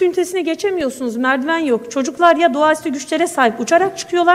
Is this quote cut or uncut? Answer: uncut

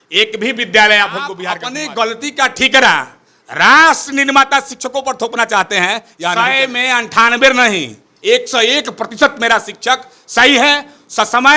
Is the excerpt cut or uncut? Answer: cut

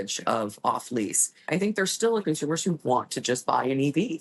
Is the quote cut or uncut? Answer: cut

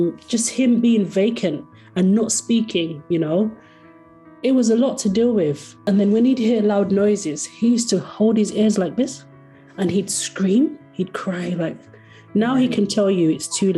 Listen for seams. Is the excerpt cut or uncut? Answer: cut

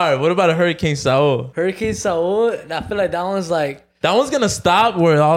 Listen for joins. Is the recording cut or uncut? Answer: cut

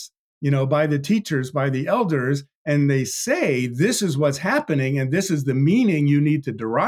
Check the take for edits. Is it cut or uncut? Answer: uncut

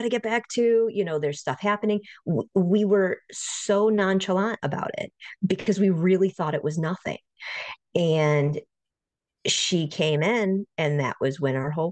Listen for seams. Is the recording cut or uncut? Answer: uncut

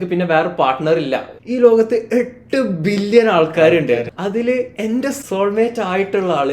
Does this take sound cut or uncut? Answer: cut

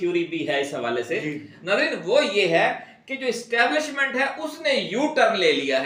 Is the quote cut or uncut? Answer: uncut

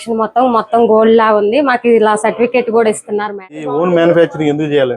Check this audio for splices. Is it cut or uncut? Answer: cut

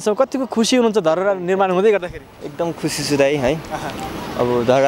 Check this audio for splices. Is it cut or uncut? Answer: uncut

